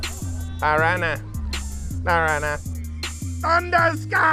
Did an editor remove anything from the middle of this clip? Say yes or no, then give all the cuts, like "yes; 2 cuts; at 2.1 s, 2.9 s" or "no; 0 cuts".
no; 0 cuts